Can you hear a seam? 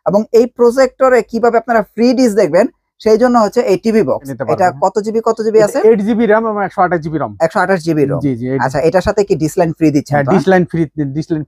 yes; 1 cut; at 4.3 s

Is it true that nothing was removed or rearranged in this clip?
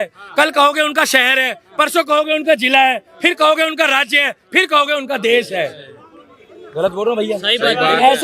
yes; 0 cuts

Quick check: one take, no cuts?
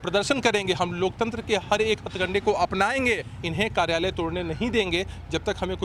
no; 1 cut; at 3.3 s

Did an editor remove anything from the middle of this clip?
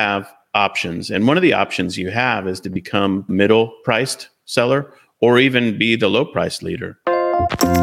yes; 1 cut; at 6.9 s

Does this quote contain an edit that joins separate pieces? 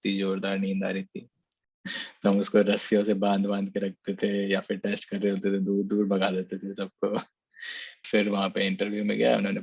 yes; 2 cuts; at 2.0 s, 8.0 s

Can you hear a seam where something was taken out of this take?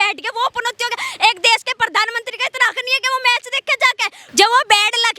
yes; 1 cut; at 4.2 s

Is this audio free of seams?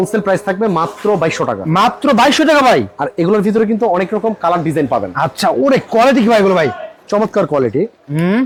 yes; 0 cuts

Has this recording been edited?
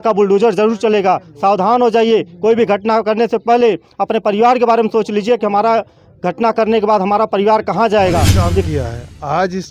yes; 1 cut; at 8.5 s

